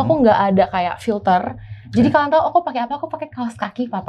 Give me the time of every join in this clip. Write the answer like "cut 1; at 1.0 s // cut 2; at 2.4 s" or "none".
none